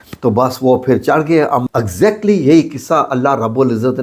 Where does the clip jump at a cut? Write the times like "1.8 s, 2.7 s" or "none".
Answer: 1.6 s